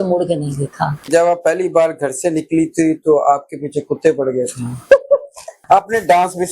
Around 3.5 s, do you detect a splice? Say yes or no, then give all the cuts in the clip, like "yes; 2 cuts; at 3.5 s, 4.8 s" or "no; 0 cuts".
no; 2 cuts; at 1.1 s, 5.6 s